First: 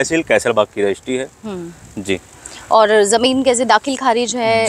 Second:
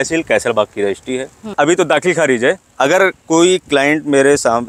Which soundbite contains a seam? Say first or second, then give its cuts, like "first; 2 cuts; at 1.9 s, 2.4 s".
second; 1 cut; at 1.5 s